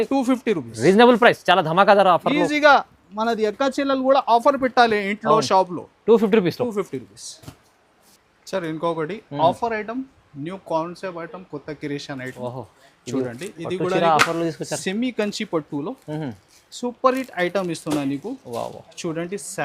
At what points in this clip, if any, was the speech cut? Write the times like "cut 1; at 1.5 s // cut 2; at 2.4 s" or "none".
none